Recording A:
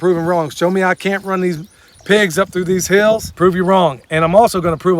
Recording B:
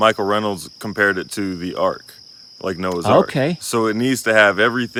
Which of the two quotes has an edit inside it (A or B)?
A